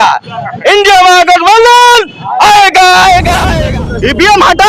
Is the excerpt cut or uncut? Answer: cut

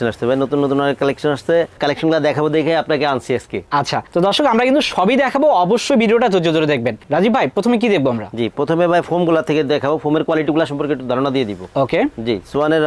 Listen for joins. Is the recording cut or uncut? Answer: uncut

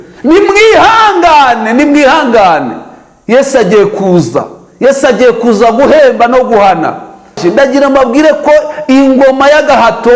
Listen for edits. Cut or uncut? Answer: cut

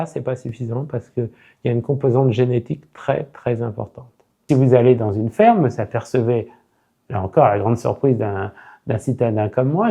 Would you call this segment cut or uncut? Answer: cut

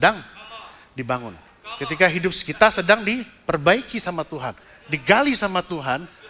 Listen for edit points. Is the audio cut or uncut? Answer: uncut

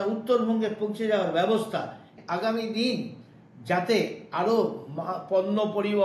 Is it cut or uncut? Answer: cut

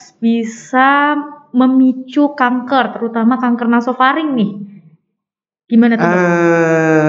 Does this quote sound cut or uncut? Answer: uncut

